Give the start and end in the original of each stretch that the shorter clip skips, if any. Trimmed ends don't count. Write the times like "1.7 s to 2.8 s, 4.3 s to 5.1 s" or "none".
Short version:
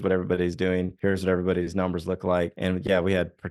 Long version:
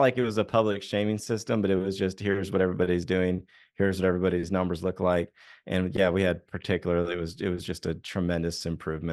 3.4 s to 3.7 s, 5.3 s to 5.6 s